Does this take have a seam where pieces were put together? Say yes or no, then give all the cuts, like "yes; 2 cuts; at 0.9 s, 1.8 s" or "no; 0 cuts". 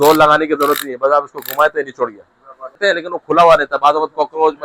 yes; 1 cut; at 2.8 s